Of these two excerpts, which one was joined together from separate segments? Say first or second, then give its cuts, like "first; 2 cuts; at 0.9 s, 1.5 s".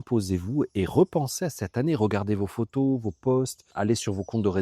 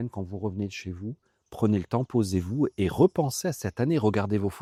first; 1 cut; at 3.6 s